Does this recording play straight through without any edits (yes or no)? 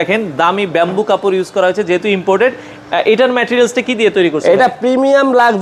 yes